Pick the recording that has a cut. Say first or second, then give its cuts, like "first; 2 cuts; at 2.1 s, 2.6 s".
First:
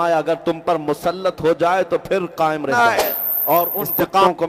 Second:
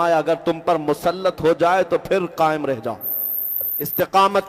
first; 1 cut; at 2.7 s